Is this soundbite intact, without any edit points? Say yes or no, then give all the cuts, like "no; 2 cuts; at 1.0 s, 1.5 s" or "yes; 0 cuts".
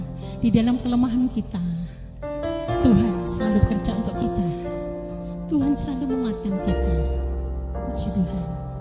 yes; 0 cuts